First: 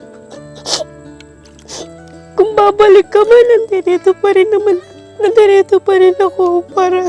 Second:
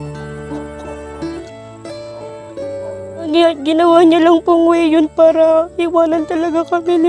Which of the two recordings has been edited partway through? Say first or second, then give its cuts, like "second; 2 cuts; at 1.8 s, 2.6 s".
second; 2 cuts; at 1.4 s, 3.3 s